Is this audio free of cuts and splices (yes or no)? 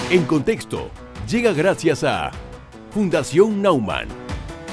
yes